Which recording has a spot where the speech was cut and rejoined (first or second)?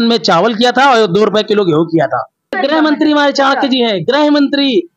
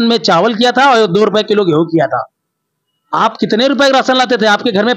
first